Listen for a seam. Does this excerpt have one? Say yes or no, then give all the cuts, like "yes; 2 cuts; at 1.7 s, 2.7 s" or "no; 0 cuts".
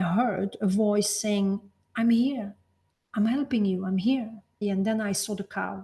yes; 1 cut; at 4.6 s